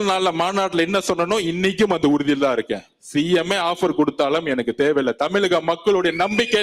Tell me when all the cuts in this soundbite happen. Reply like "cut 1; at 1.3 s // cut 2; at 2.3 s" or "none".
none